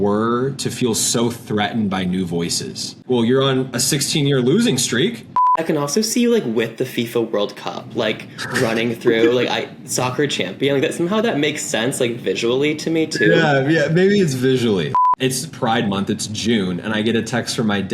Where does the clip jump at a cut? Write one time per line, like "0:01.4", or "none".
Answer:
0:03.0
0:05.6
0:14.9